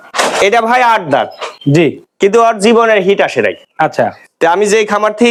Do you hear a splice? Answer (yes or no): no